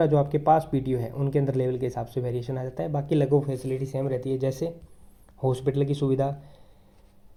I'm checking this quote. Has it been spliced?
no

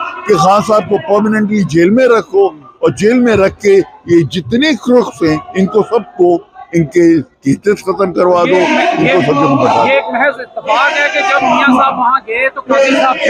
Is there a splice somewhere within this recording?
no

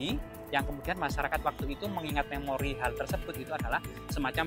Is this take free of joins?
yes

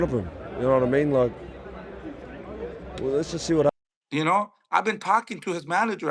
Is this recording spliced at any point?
yes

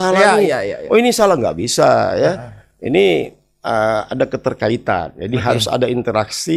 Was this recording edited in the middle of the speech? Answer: no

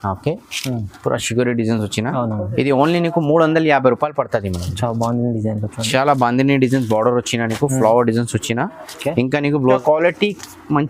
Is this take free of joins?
no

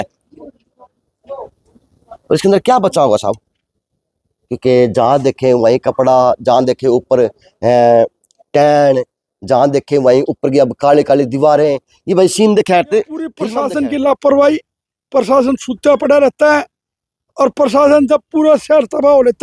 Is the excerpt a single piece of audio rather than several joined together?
no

